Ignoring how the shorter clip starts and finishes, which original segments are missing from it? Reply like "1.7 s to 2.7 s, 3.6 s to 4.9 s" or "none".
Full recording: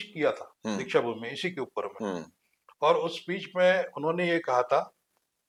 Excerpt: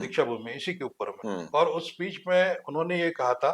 2.2 s to 2.7 s